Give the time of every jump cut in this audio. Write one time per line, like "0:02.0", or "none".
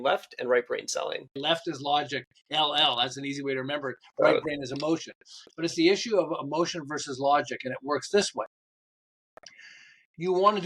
0:01.3